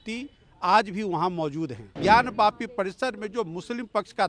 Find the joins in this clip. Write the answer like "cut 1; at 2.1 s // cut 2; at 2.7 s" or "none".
cut 1; at 1.9 s